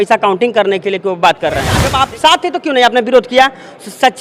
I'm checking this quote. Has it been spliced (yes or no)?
yes